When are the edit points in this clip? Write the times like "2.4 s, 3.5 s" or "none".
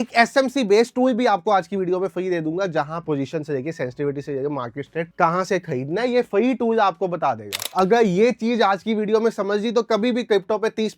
3.0 s, 5.1 s, 7.7 s